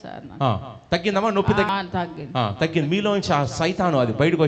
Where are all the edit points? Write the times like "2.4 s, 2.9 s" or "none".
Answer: 1.7 s